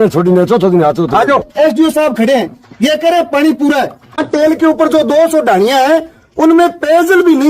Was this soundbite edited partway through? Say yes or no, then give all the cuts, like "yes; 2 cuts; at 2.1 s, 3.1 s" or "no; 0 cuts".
yes; 2 cuts; at 1.5 s, 4.2 s